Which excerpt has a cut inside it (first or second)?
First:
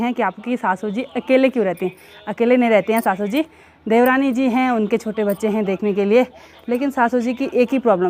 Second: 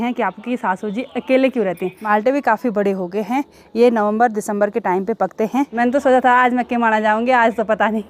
second